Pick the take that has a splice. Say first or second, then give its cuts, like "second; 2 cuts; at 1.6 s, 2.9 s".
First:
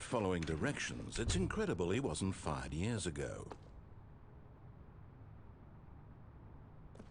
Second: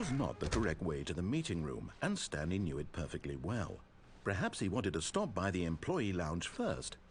first; 1 cut; at 3.5 s